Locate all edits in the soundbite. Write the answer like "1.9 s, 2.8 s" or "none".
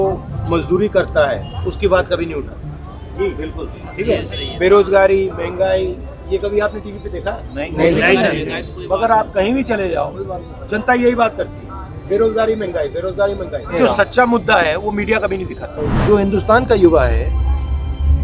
15.9 s